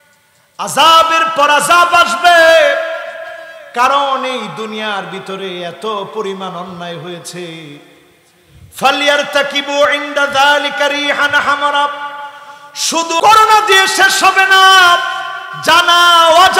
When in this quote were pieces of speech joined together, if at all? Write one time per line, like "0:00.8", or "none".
0:13.2